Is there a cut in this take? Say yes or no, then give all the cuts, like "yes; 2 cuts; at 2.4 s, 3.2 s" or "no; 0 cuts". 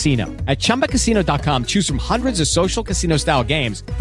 no; 0 cuts